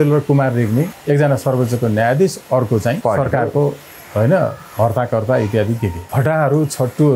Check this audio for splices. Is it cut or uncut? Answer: cut